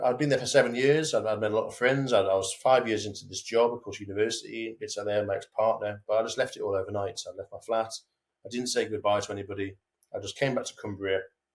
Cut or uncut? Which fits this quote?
uncut